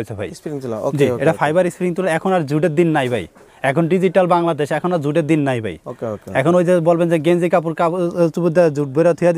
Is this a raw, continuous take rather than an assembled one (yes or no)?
yes